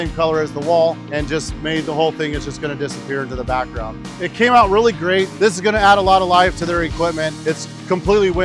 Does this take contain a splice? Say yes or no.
yes